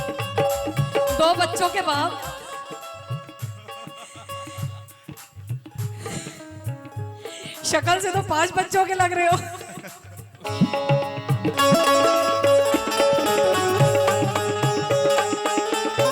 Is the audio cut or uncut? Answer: uncut